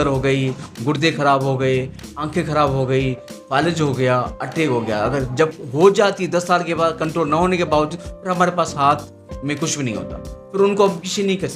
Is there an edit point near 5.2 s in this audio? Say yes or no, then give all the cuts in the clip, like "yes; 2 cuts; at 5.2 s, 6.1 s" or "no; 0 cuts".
no; 0 cuts